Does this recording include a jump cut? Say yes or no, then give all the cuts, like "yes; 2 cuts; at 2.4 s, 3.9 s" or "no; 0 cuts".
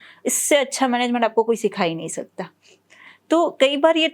no; 0 cuts